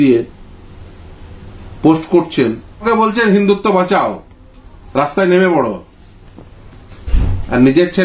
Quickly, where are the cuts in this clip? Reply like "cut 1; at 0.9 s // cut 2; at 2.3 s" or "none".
cut 1; at 2.8 s